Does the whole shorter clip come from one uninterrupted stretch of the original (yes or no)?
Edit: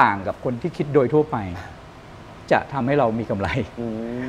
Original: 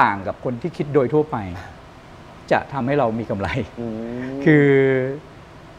yes